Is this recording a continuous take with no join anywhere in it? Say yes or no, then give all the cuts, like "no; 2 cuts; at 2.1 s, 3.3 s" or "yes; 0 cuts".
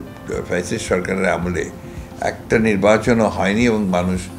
yes; 0 cuts